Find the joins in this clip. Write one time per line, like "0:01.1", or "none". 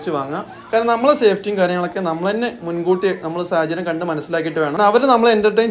0:04.8